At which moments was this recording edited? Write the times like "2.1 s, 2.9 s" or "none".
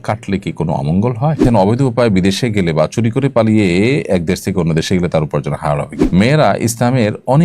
1.4 s, 5.9 s